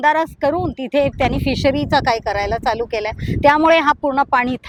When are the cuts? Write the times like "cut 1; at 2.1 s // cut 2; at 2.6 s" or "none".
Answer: none